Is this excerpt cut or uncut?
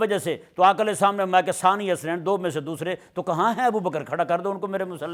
uncut